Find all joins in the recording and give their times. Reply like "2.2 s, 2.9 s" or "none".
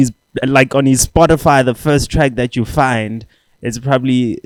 none